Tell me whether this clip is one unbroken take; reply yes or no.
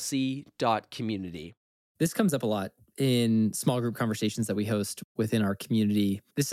yes